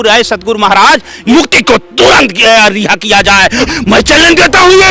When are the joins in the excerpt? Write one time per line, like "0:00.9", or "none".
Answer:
0:01.2
0:03.7

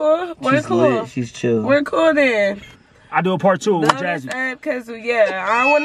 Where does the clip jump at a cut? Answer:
0:02.7

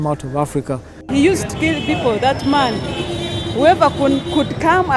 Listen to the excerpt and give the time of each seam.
0:01.0

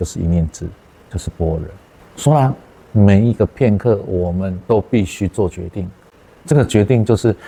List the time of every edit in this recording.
none

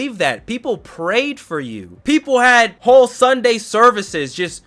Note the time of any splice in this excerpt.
0:01.9
0:02.8

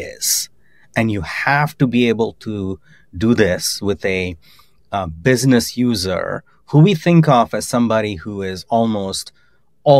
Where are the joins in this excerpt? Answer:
none

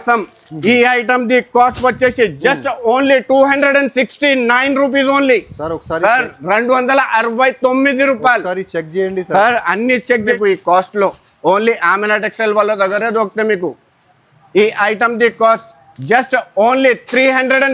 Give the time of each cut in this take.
0:10.3

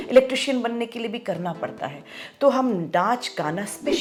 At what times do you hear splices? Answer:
none

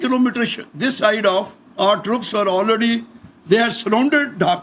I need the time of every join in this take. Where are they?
0:01.6

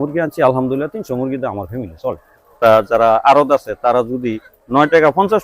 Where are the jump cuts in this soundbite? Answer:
0:02.6

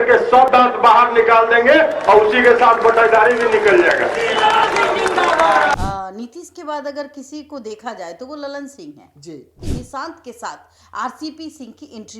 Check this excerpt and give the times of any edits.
0:05.8
0:09.6

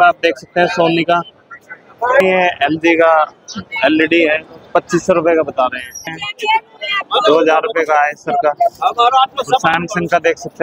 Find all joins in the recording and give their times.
0:02.2
0:06.2

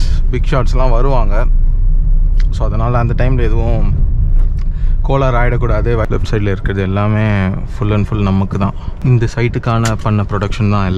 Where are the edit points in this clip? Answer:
0:06.0
0:08.9

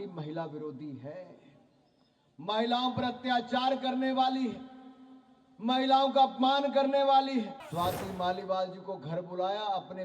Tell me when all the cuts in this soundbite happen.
0:07.6

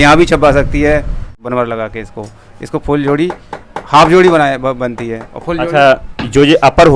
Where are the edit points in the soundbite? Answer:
0:01.3

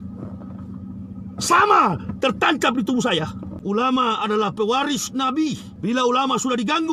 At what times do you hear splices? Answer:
0:03.5
0:05.7

